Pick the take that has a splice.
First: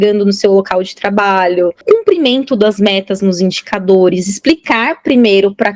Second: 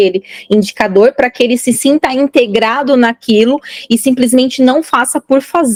first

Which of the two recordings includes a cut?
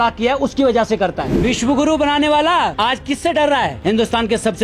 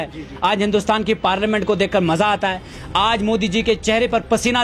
first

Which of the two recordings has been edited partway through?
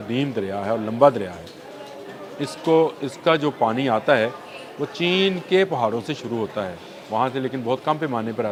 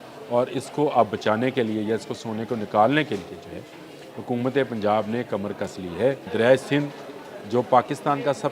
second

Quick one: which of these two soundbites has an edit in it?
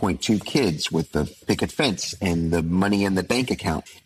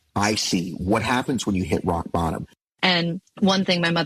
second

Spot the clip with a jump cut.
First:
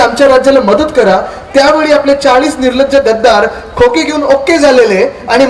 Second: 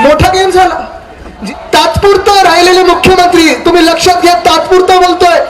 second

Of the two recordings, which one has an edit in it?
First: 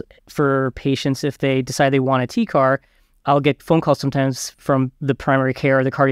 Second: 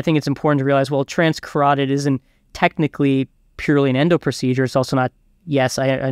first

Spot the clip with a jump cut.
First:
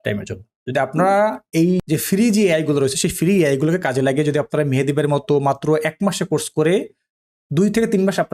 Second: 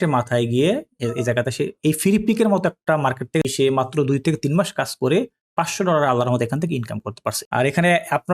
second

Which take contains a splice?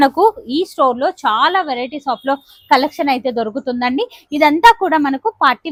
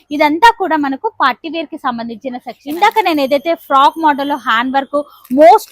second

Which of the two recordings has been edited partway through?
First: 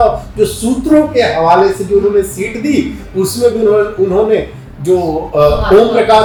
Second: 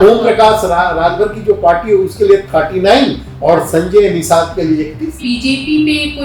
second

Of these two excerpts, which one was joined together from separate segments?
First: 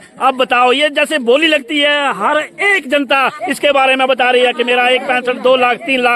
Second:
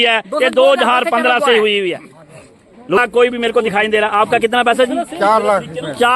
second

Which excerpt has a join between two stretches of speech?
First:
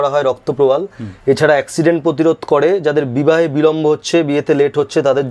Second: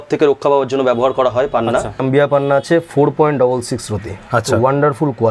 second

